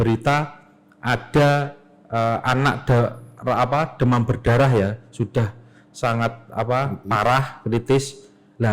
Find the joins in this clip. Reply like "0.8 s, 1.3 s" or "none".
none